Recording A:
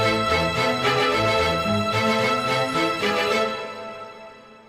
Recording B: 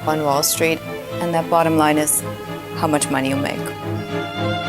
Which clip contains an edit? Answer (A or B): B